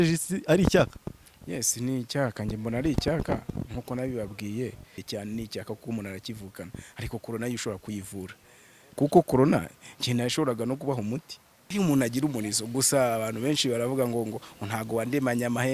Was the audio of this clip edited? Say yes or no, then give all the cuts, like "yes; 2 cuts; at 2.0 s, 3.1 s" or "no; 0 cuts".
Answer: yes; 3 cuts; at 5.0 s, 8.9 s, 11.6 s